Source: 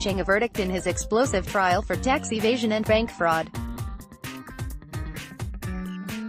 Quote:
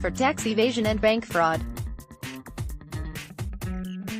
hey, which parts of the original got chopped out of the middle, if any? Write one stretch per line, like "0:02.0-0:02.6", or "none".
0:03.4-0:03.6